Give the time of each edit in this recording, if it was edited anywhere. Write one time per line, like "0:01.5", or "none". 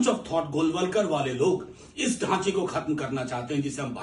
none